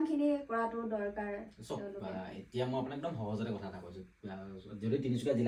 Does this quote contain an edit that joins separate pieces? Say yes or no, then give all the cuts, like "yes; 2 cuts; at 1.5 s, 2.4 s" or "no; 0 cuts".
no; 0 cuts